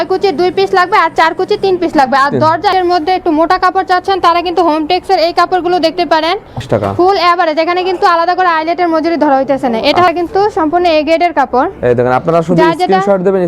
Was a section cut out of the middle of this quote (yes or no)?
yes